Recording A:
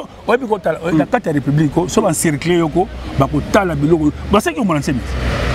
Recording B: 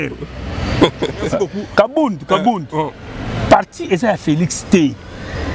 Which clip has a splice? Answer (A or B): B